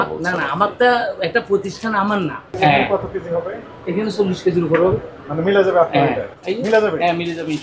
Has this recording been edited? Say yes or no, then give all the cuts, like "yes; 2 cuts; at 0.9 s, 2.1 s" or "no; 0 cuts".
yes; 1 cut; at 2.5 s